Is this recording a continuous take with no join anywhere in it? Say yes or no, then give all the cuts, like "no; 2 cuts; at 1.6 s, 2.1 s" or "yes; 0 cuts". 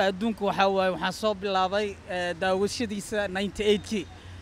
yes; 0 cuts